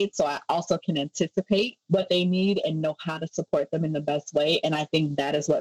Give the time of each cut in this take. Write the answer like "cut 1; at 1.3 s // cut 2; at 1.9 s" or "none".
cut 1; at 1.8 s

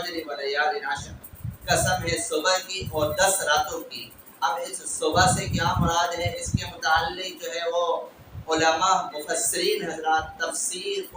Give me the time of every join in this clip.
none

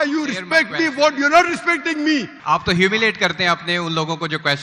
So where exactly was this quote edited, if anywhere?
cut 1; at 2.3 s

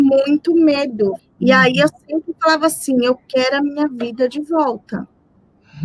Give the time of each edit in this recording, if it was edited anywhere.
cut 1; at 1.2 s

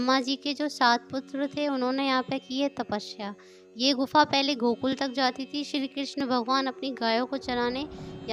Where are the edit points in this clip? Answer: none

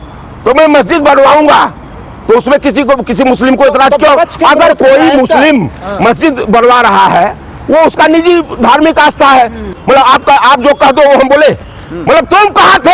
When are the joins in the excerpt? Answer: cut 1; at 9.8 s

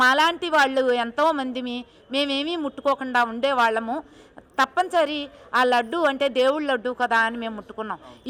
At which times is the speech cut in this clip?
none

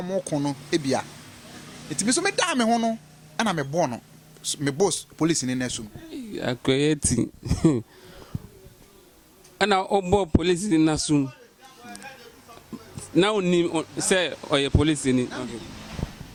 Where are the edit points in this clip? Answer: none

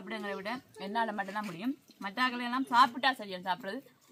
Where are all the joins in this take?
none

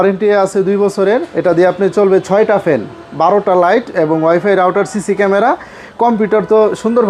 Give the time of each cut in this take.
none

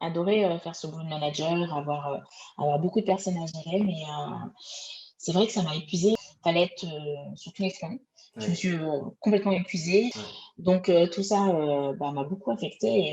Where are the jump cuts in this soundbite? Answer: cut 1; at 6.2 s // cut 2; at 10.2 s

